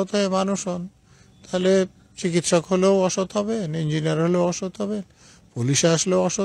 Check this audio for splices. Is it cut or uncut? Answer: uncut